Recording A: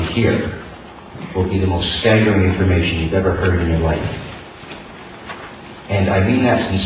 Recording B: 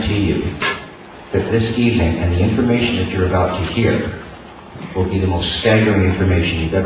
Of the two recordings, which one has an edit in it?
A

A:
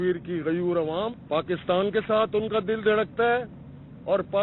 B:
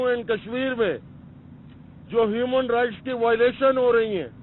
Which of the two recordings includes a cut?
A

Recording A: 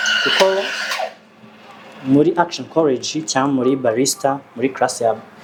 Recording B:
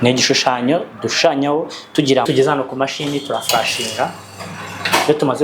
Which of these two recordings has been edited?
B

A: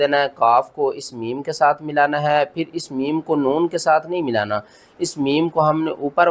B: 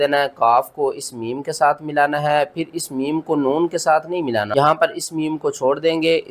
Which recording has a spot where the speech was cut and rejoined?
B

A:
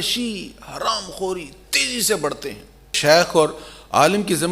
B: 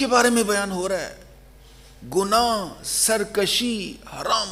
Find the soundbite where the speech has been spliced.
A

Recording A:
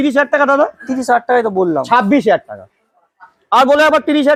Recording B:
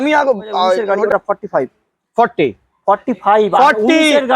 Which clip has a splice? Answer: B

